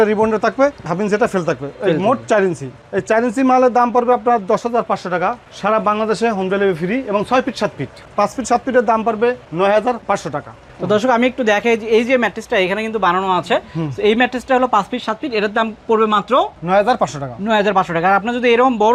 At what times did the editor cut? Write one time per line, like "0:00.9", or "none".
none